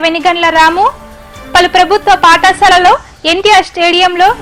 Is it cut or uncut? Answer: uncut